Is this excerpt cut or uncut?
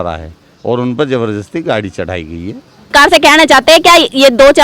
cut